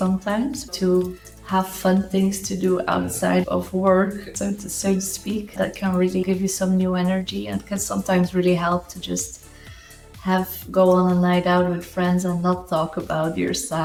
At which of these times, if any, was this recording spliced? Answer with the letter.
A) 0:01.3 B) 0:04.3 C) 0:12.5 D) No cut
D